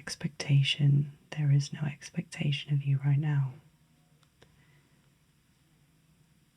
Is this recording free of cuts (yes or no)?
yes